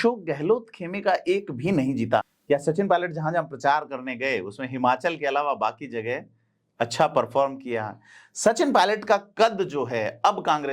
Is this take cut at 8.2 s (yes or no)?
no